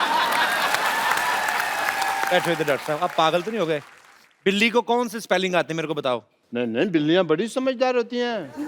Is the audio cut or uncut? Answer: cut